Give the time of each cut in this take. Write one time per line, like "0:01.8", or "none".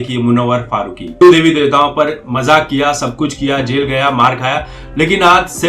0:01.1